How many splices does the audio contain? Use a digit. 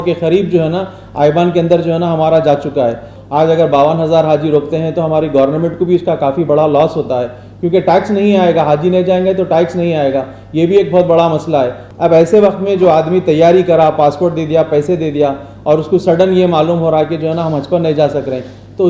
2